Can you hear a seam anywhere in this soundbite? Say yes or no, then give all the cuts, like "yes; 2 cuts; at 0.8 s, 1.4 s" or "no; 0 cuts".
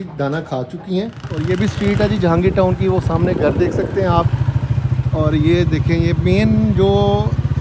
yes; 1 cut; at 1.3 s